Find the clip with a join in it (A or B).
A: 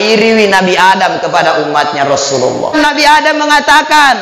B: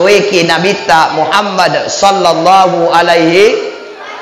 A